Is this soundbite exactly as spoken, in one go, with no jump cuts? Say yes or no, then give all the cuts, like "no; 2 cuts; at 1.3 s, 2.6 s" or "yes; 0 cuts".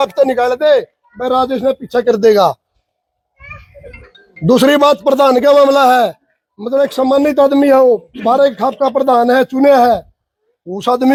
yes; 0 cuts